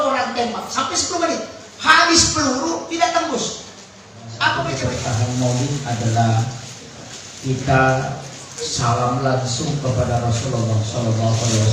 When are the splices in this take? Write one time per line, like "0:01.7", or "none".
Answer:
0:04.7